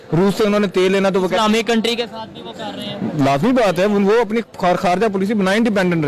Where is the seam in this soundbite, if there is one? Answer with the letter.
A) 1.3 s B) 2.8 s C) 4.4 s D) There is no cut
D